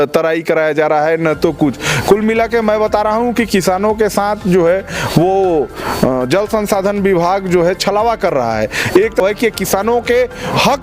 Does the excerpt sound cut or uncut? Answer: cut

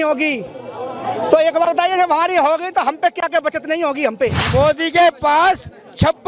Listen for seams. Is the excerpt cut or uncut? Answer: cut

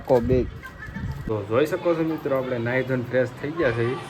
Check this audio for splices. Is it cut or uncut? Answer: uncut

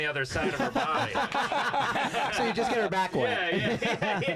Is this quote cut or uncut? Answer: uncut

